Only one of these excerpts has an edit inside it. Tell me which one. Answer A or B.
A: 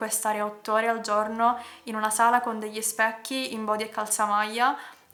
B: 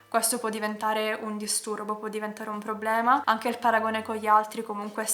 B